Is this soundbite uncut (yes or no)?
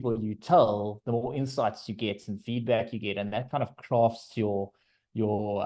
yes